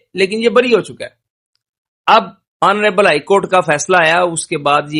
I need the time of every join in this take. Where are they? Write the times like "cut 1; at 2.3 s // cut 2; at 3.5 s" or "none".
none